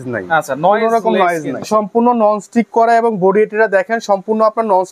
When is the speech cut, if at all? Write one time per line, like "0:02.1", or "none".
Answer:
0:01.7